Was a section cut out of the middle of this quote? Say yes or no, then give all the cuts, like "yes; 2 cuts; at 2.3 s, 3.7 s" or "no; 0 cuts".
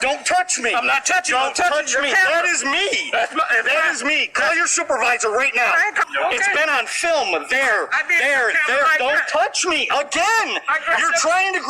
yes; 1 cut; at 6.0 s